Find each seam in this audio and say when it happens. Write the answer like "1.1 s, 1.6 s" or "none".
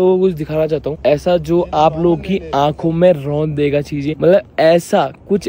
0.9 s, 4.0 s